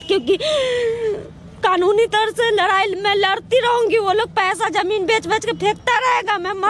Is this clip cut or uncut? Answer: uncut